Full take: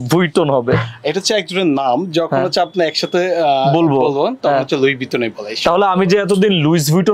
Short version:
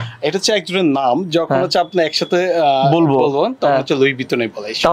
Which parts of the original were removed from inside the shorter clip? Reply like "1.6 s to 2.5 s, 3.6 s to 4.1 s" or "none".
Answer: none